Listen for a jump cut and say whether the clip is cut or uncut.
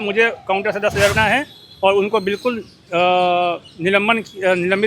cut